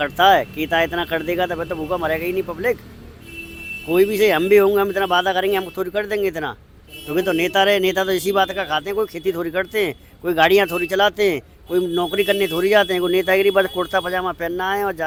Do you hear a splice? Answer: no; 0 cuts

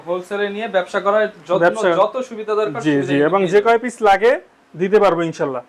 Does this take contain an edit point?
no; 0 cuts

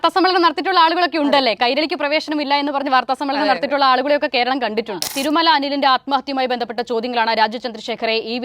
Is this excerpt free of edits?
no; 1 cut; at 5.1 s

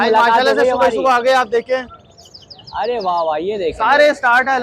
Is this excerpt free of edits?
yes; 0 cuts

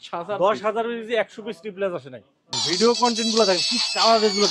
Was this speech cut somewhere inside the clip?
yes; 1 cut; at 2.6 s

